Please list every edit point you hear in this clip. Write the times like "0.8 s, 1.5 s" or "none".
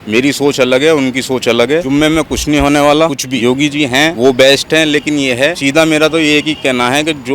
1.9 s, 3.5 s, 5.6 s

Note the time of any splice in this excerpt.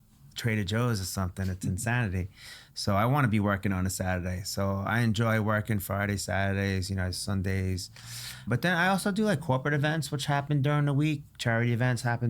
8.5 s

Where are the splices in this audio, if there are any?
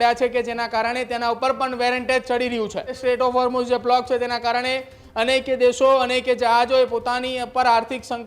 3.0 s

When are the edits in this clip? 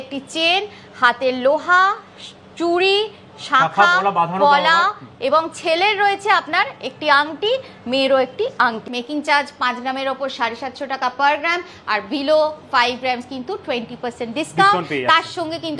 8.9 s

